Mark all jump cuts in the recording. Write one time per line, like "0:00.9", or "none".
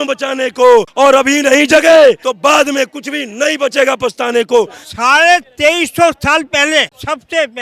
0:00.9
0:02.3
0:04.8